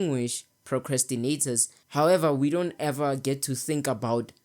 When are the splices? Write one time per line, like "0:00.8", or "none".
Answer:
0:01.8